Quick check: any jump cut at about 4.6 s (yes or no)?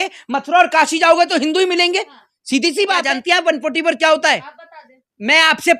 no